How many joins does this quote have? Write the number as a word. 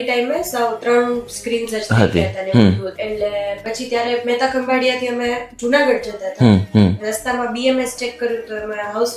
one